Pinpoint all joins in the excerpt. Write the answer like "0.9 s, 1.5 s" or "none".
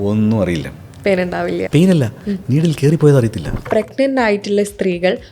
1.6 s, 3.7 s